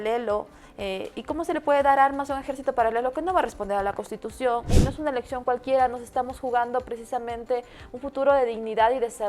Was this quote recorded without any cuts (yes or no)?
no